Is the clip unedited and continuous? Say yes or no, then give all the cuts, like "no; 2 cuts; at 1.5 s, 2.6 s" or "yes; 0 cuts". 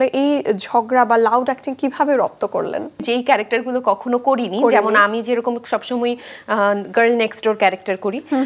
no; 1 cut; at 3.0 s